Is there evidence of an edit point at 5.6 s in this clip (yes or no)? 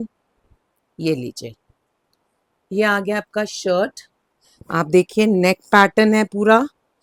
no